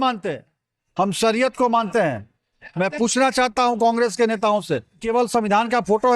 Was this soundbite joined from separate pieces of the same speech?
yes; 1 cut; at 5.0 s

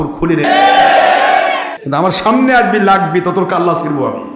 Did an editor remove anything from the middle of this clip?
yes; 1 cut; at 1.7 s

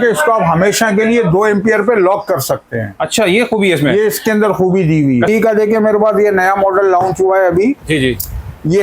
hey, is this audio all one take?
no; 1 cut; at 5.3 s

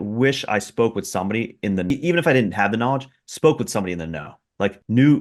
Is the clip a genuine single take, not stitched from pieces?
yes; 0 cuts

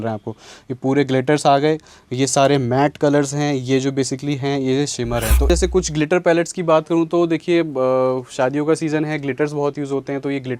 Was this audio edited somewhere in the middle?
yes; 1 cut; at 5.5 s

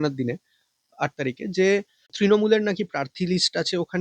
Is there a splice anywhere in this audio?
yes; 1 cut; at 2.0 s

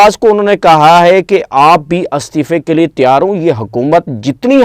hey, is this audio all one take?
yes; 0 cuts

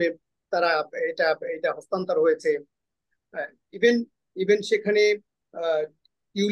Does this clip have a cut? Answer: no; 0 cuts

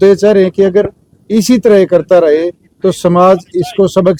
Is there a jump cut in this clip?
no; 0 cuts

